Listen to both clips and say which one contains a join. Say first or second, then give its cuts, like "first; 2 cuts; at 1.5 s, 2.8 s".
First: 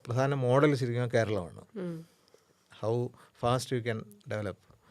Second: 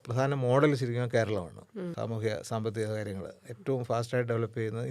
second; 1 cut; at 1.9 s